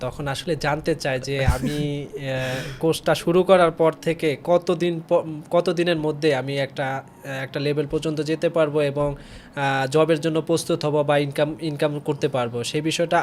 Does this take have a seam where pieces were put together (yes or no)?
no